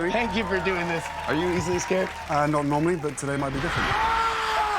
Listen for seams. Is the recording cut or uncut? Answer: cut